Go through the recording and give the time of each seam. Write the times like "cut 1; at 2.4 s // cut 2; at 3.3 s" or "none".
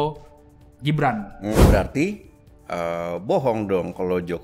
cut 1; at 1.5 s